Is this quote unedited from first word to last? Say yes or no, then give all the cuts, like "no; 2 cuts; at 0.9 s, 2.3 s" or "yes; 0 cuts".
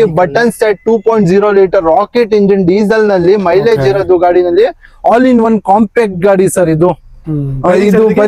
yes; 0 cuts